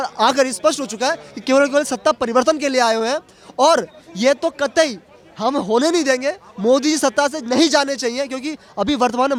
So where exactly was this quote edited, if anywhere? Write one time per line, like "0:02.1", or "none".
none